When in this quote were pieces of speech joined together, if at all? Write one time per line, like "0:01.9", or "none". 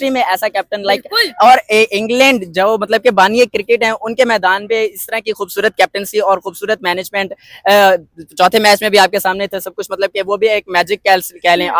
none